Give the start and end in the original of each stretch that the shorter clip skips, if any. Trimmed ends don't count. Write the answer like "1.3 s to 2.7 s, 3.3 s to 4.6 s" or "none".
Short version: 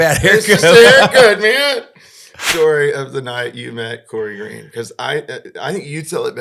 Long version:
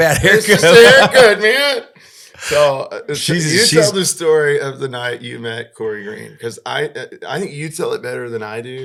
2.4 s to 4.1 s